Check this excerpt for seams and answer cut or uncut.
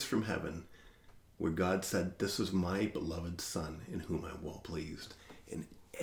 uncut